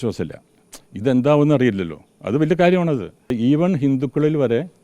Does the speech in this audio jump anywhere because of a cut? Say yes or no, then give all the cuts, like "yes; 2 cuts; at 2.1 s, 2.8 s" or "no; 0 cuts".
yes; 1 cut; at 3.3 s